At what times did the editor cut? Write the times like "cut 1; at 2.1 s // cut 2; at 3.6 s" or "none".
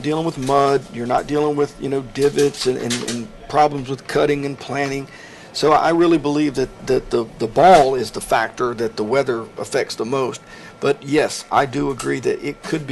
cut 1; at 4.9 s

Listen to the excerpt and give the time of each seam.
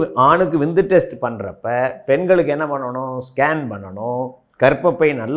cut 1; at 4.4 s

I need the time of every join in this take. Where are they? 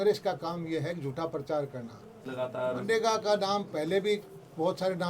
cut 1; at 2.2 s

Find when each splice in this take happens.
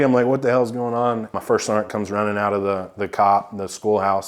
cut 1; at 1.4 s

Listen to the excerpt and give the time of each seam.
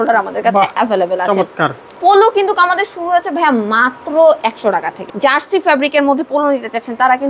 cut 1; at 1.8 s // cut 2; at 5.1 s

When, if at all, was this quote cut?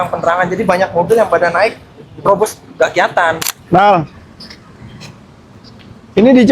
cut 1; at 3.6 s

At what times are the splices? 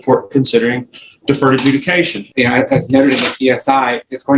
cut 1; at 2.2 s

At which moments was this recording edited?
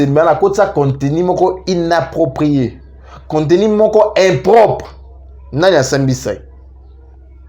none

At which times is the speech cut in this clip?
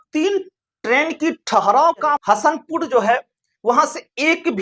cut 1; at 2.2 s

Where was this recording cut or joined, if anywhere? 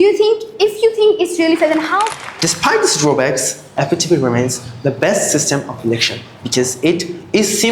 cut 1; at 2.1 s

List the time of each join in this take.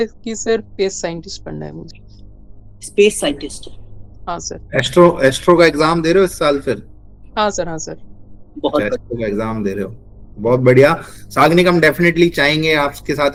none

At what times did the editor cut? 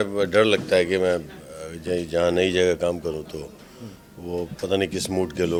none

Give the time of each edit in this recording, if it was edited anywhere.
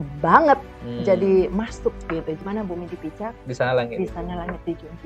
cut 1; at 2.4 s

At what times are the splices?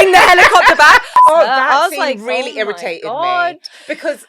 cut 1; at 1.1 s

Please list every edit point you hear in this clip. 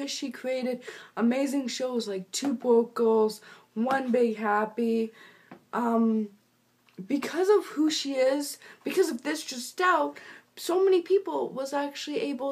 none

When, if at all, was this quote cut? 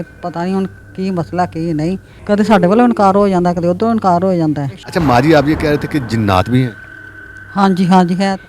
cut 1; at 2.1 s // cut 2; at 4.8 s

